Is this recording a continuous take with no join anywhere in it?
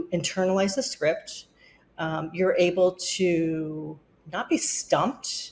yes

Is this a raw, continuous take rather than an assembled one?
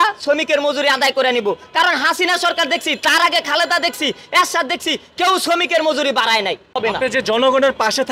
no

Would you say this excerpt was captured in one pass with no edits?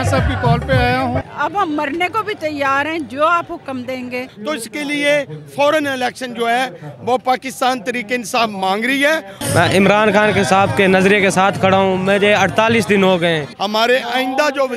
no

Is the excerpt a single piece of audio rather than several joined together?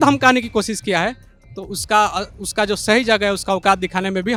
yes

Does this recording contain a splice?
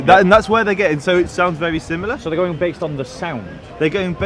no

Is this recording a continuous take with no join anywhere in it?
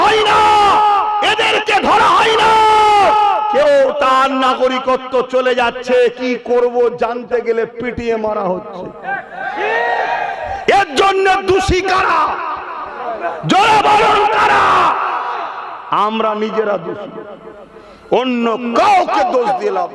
yes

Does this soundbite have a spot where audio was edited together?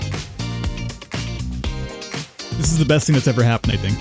no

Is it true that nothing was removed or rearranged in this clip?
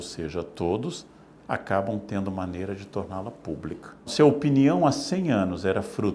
no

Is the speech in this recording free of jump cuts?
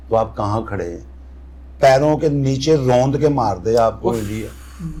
yes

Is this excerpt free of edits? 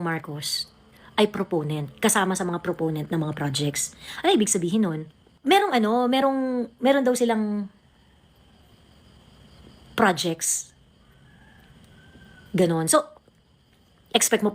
no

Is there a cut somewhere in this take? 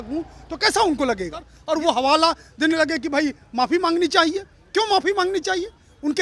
yes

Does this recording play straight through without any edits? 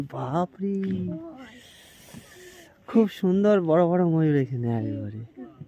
yes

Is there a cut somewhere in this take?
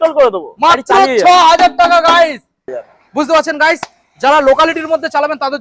no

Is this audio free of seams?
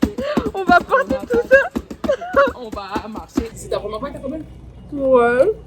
no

